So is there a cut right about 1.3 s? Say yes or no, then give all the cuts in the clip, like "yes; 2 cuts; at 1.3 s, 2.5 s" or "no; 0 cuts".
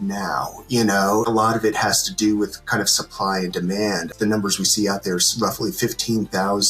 yes; 2 cuts; at 1.3 s, 4.1 s